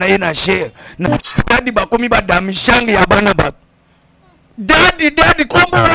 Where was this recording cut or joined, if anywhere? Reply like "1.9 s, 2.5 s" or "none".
1.1 s

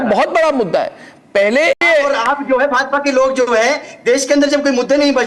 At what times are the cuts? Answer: 1.9 s

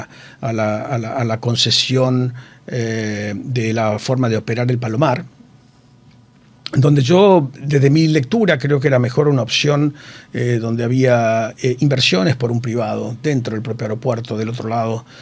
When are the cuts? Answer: none

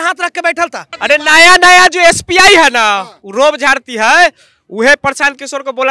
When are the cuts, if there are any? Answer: 1.0 s

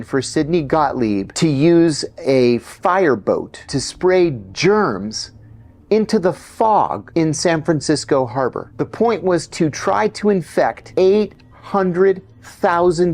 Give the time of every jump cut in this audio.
1.3 s, 3.8 s, 7.0 s, 8.6 s, 10.8 s

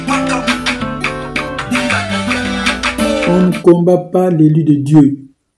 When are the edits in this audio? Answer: 3.2 s

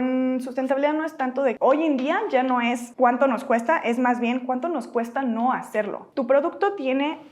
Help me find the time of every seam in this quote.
1.6 s, 2.9 s, 6.0 s

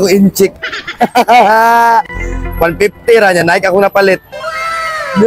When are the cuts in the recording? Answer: none

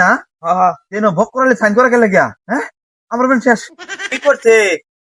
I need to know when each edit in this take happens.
2.4 s, 4.1 s

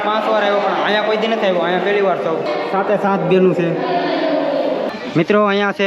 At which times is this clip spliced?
2.5 s, 4.9 s

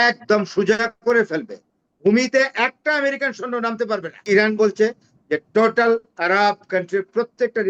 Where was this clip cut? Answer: 4.2 s

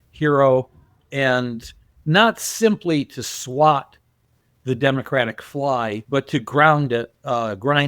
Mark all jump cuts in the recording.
1.9 s, 6.0 s

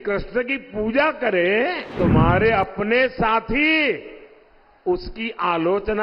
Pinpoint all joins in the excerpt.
1.9 s

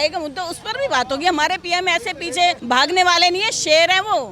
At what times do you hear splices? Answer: 2.6 s

